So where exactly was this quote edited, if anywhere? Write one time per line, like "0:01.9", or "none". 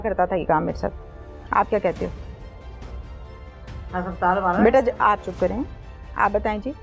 none